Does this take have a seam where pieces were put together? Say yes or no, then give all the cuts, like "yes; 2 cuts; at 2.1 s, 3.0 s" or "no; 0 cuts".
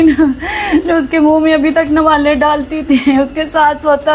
no; 0 cuts